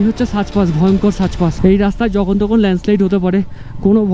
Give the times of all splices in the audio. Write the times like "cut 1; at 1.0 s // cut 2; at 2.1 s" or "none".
cut 1; at 1.6 s